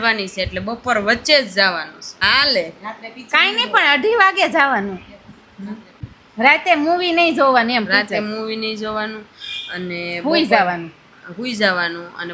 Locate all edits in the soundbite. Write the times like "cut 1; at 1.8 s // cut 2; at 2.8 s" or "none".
none

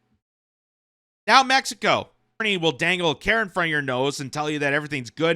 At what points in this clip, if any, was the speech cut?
cut 1; at 2.4 s

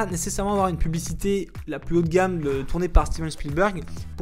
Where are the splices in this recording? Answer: none

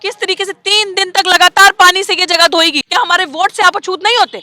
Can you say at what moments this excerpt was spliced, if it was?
cut 1; at 2.8 s

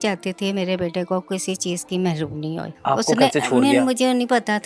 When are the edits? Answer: cut 1; at 2.7 s

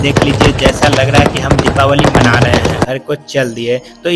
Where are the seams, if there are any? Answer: cut 1; at 2.9 s

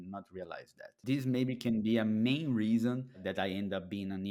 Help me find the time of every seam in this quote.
cut 1; at 1.0 s // cut 2; at 3.2 s

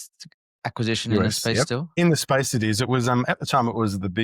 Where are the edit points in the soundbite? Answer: cut 1; at 1.9 s

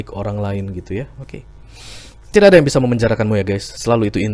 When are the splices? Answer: none

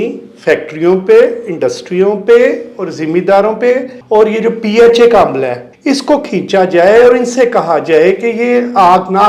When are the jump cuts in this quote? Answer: cut 1; at 3.9 s // cut 2; at 5.7 s

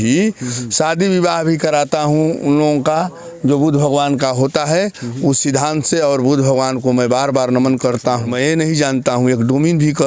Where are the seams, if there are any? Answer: cut 1; at 8.3 s

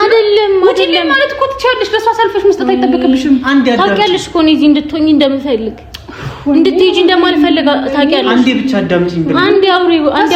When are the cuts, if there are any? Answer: none

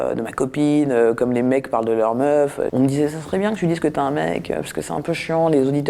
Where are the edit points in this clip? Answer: none

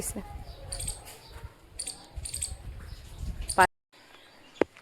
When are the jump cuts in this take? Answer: cut 1; at 3.7 s

